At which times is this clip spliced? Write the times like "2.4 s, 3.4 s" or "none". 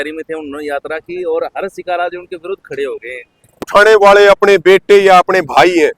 3.6 s